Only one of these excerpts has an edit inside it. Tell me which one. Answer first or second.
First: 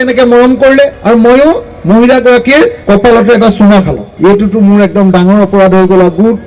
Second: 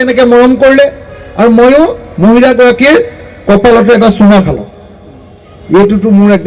first